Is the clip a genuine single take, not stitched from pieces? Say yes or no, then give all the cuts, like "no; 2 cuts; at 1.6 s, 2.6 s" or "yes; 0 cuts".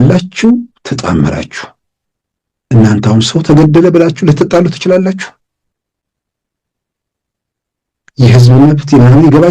yes; 0 cuts